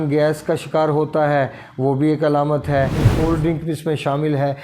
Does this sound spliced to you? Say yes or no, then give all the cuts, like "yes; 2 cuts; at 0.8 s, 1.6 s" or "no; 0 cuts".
yes; 1 cut; at 3.0 s